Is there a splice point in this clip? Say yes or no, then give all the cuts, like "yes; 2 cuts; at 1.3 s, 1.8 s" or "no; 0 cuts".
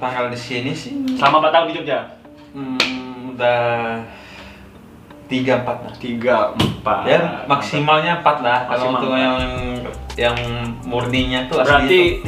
no; 0 cuts